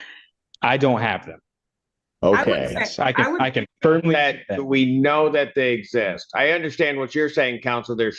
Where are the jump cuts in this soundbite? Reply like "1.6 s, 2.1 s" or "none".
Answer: none